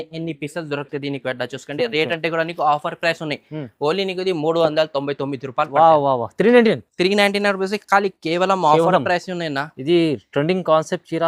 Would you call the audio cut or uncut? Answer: uncut